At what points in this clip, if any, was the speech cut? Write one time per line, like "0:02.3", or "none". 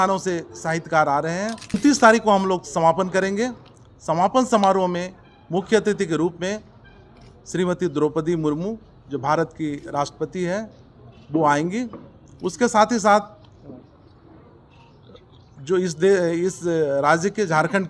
0:01.7